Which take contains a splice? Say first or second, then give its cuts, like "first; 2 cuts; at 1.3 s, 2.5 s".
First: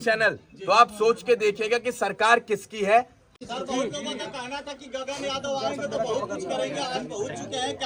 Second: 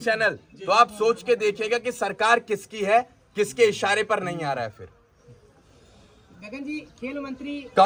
first; 1 cut; at 3.2 s